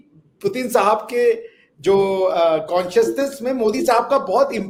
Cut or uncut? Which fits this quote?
uncut